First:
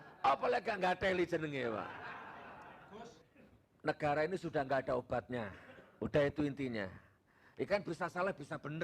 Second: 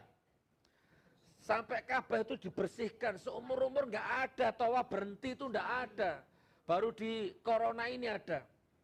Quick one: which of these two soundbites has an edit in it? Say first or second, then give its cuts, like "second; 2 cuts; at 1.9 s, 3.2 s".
first; 1 cut; at 3.2 s